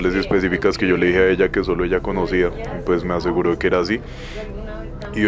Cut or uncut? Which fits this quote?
uncut